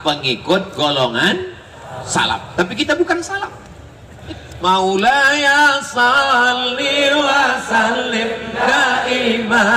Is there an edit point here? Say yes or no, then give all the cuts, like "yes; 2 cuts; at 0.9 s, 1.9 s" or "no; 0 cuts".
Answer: yes; 1 cut; at 4.2 s